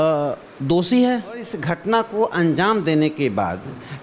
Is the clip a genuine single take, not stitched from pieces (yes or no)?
no